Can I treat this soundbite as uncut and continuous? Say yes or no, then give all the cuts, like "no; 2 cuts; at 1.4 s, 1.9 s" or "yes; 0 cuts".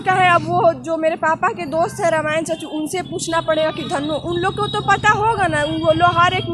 yes; 0 cuts